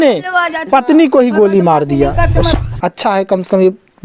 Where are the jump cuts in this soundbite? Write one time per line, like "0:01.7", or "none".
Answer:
0:02.5